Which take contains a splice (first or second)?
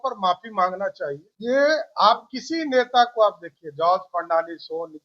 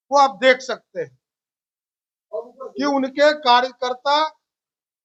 first